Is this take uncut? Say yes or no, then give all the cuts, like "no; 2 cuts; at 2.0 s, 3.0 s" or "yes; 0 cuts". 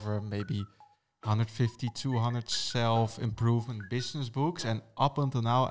yes; 0 cuts